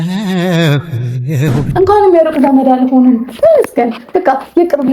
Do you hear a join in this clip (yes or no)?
yes